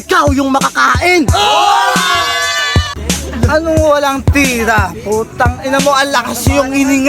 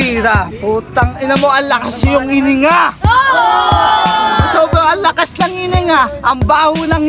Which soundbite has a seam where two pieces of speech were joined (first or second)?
first